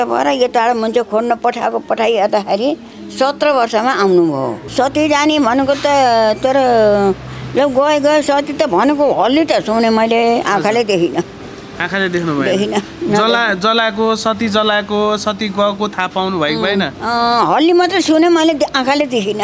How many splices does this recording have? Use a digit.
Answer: 1